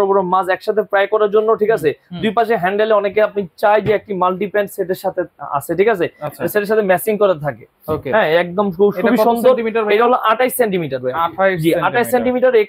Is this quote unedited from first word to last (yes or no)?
yes